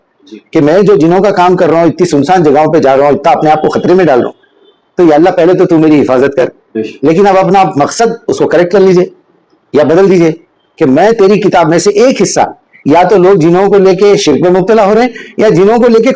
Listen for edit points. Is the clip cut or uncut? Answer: uncut